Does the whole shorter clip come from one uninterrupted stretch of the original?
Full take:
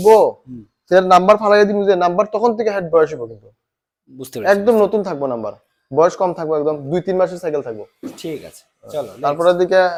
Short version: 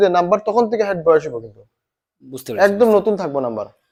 yes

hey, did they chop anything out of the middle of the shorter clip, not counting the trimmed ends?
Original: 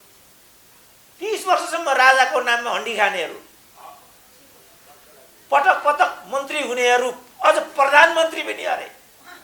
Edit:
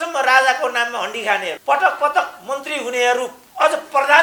yes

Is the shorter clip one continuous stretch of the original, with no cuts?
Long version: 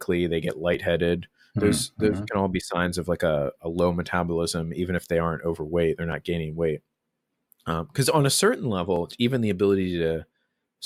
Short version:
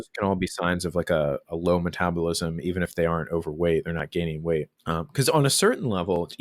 no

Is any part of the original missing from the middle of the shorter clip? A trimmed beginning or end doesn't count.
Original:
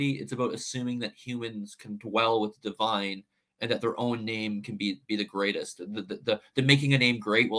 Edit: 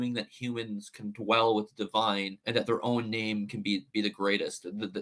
yes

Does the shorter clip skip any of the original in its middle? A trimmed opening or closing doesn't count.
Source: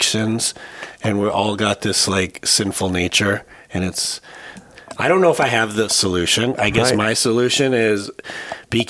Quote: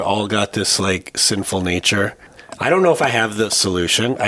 yes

